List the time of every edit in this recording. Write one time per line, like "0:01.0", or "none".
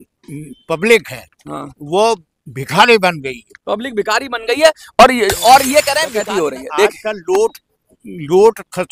0:06.0

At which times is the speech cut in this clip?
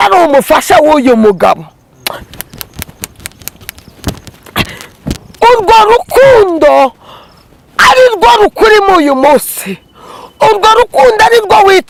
none

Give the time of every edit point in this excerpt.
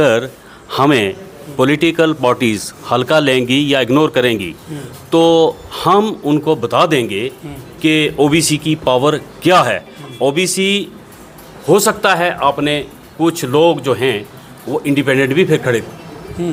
none

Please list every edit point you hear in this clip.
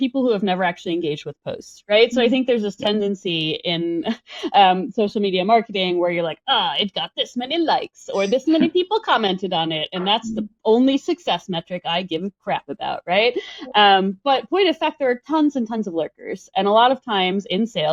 none

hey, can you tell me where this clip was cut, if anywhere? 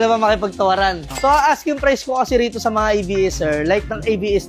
0:01.1

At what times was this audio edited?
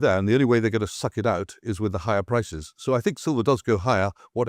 none

